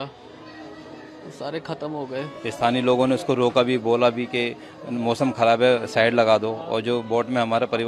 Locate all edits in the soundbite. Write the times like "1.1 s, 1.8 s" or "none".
2.3 s